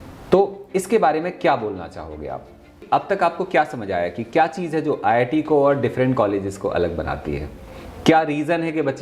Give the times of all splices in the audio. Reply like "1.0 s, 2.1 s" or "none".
2.8 s